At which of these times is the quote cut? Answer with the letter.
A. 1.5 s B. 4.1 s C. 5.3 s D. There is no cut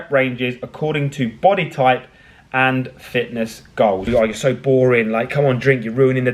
B